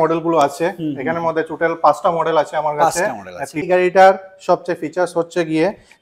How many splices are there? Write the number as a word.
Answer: one